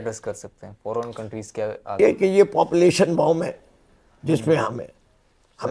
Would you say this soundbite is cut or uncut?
cut